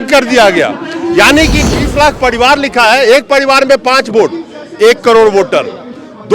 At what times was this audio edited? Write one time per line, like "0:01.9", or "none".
0:01.6